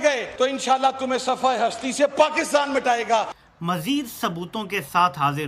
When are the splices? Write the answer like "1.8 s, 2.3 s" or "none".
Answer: 3.4 s

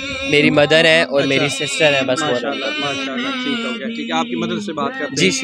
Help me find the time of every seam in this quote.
none

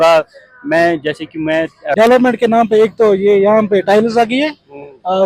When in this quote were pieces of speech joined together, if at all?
2.0 s

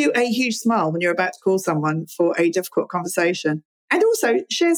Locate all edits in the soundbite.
none

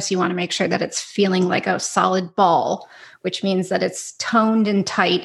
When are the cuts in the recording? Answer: none

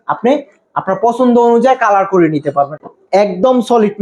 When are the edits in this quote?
2.8 s

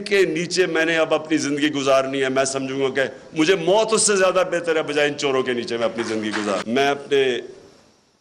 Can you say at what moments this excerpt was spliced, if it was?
6.6 s

